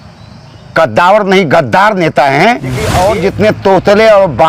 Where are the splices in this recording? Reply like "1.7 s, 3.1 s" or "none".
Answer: 2.9 s